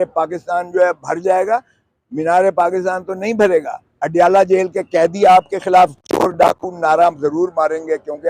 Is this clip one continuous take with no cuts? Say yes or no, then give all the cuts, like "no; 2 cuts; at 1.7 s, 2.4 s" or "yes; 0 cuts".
yes; 0 cuts